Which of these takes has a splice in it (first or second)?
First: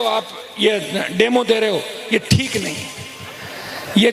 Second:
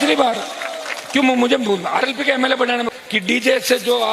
second